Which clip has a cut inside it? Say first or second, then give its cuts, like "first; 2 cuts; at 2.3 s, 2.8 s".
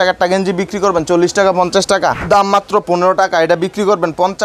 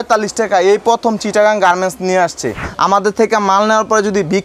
second; 1 cut; at 2.6 s